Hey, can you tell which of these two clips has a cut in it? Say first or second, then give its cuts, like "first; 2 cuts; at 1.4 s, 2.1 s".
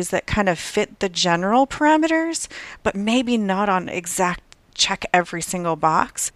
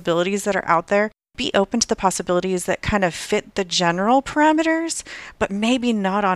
second; 1 cut; at 1.2 s